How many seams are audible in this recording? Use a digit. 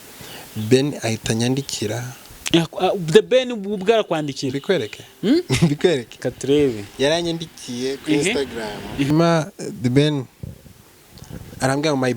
1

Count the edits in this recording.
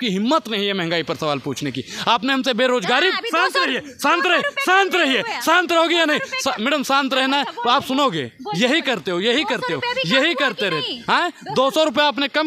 0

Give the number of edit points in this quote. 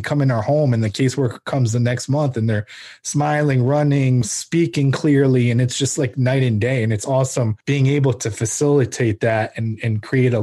2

